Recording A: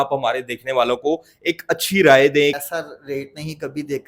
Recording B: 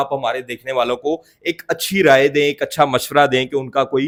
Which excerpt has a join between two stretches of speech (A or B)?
A